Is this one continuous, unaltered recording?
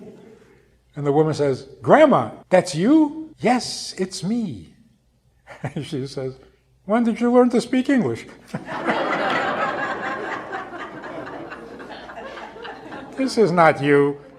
no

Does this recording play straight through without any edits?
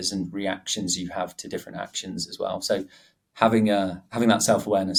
yes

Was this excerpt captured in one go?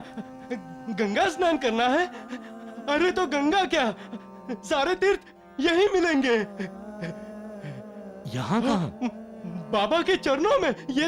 yes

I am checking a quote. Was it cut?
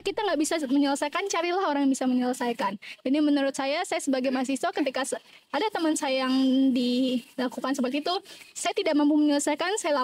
no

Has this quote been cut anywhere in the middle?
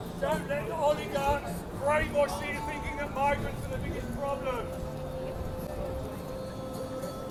no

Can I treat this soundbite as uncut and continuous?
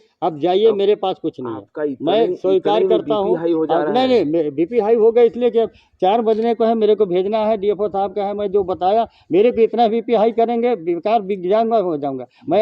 yes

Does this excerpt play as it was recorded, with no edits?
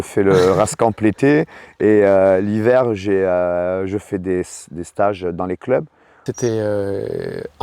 no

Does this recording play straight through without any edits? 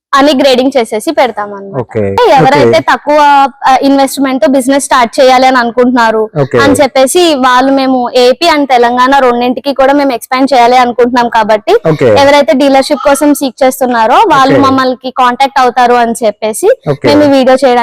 no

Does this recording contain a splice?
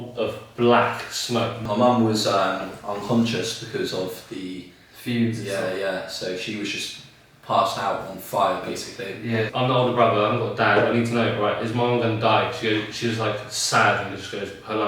yes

